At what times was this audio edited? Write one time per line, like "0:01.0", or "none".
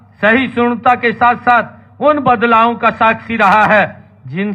none